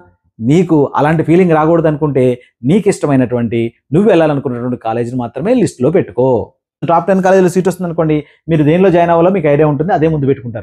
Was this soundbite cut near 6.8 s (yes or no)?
yes